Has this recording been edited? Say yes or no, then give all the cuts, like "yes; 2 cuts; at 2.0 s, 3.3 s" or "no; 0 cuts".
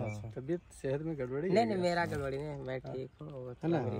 no; 0 cuts